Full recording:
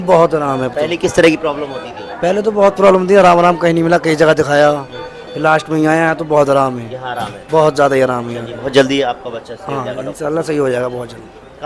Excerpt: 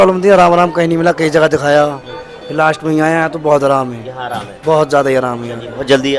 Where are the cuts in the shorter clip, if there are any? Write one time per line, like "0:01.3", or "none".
none